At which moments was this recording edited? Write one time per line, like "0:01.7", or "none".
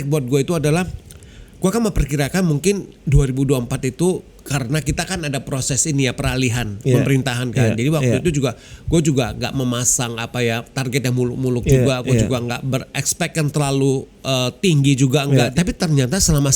0:15.5